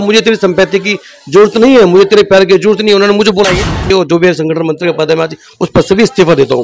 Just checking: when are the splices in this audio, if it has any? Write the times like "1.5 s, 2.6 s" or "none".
3.8 s

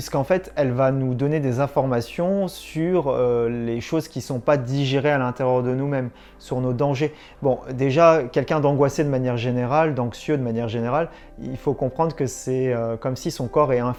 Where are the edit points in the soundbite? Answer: none

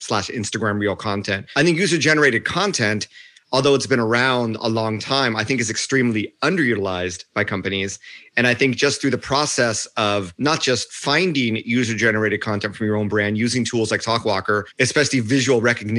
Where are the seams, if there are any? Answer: 1.4 s, 10.3 s, 14.7 s

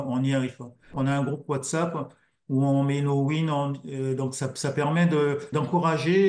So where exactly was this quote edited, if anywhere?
0.9 s, 5.5 s

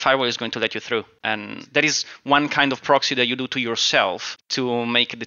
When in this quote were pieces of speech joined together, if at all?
1.1 s, 4.4 s

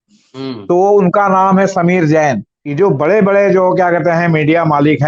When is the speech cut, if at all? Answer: 2.6 s

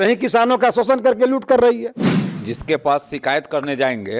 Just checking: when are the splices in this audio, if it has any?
2.3 s

